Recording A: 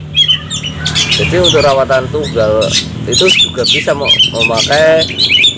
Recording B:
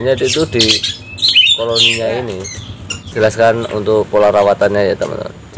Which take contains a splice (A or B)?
B